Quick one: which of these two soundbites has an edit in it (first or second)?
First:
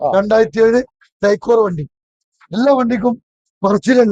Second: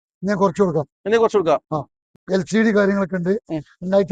second